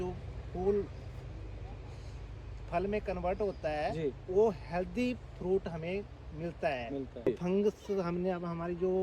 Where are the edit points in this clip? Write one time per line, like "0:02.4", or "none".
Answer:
0:07.3

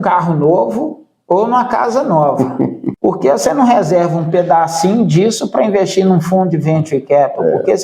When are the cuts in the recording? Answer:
0:02.8

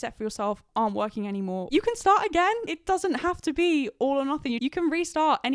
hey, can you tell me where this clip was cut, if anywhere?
0:01.6
0:02.6
0:04.6

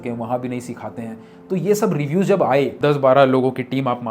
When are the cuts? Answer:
0:02.7

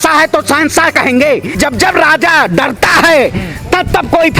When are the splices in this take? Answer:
0:01.5

